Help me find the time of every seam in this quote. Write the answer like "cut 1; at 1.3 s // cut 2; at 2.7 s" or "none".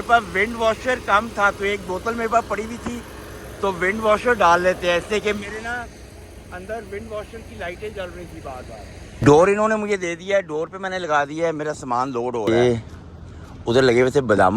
cut 1; at 9.1 s // cut 2; at 12.5 s